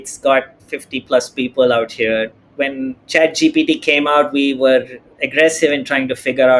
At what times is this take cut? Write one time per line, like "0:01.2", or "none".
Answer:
0:02.3